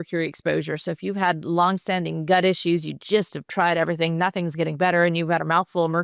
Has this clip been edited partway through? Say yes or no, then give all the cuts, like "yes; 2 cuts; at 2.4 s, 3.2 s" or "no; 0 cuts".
no; 0 cuts